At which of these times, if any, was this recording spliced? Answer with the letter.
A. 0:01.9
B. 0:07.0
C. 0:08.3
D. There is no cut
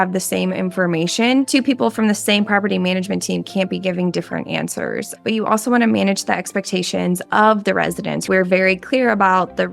C